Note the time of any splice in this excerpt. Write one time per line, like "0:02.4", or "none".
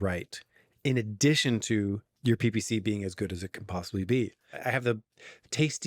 0:02.1
0:04.5